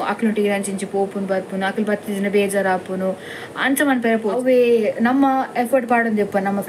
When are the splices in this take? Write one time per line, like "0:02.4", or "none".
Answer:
0:04.3

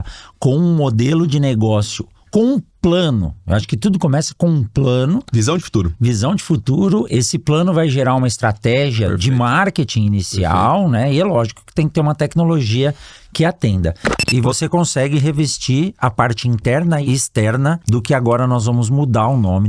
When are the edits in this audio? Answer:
0:14.1
0:17.4

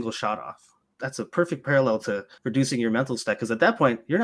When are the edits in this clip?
0:01.0
0:02.3

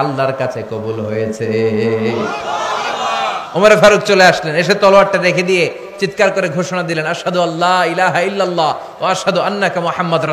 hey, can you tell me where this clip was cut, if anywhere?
none

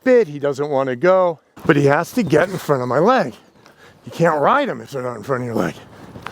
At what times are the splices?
0:01.5

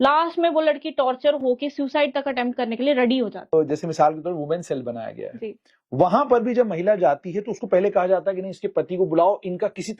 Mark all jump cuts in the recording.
0:03.5

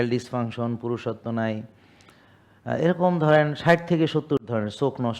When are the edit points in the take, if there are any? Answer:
none

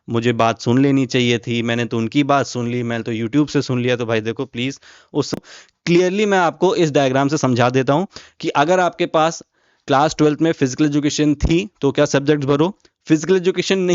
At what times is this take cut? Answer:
0:05.3

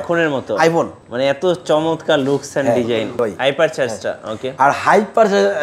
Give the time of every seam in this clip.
0:01.0
0:03.1

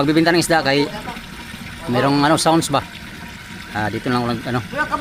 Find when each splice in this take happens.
none

